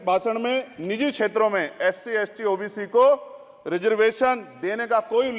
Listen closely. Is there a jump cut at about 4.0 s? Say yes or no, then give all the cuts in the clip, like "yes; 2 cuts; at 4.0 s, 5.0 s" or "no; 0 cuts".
no; 0 cuts